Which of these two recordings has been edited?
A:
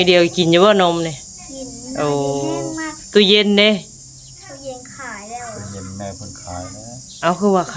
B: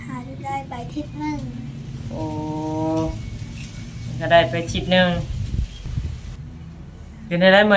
B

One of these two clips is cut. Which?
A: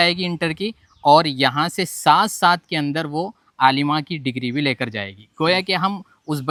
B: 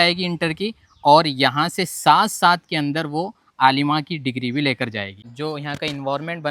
B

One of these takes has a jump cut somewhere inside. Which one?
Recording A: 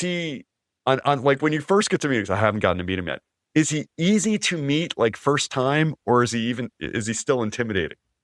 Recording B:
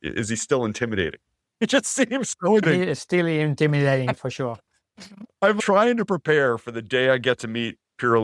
B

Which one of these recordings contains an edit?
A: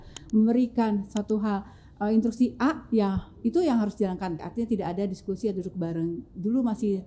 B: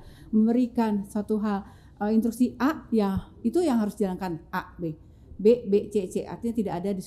A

